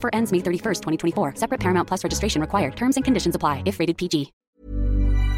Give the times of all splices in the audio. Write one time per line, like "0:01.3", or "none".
0:04.4